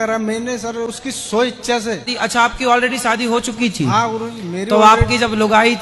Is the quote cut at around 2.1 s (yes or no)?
yes